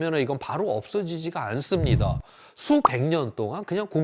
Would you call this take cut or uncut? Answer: uncut